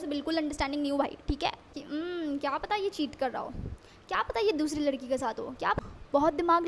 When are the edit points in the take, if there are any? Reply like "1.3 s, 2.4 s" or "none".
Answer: 1.8 s, 5.8 s